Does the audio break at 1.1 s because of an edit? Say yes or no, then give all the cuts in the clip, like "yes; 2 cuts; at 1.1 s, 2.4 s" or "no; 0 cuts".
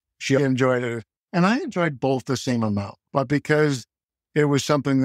no; 1 cut; at 3.0 s